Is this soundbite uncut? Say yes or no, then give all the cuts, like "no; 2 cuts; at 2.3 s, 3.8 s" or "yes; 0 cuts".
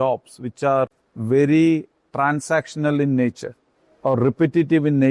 no; 1 cut; at 1.1 s